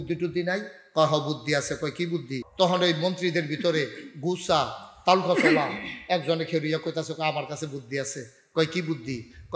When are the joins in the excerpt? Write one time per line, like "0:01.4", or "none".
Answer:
0:02.4